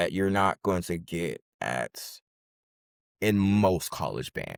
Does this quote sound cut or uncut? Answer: uncut